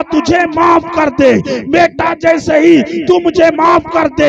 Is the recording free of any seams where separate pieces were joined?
yes; 0 cuts

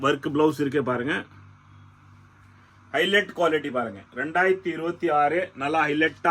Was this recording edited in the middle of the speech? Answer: no; 0 cuts

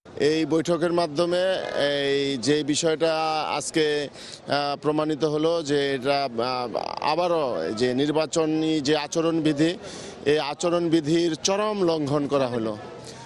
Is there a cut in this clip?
no; 0 cuts

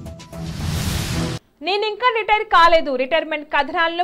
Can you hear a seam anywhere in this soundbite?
no; 0 cuts

